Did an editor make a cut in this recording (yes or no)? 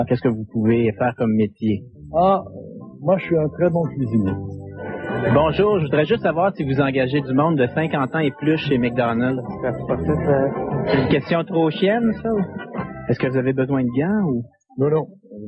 no